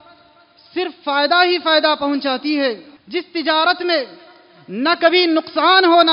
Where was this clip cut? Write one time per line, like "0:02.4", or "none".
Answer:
0:02.9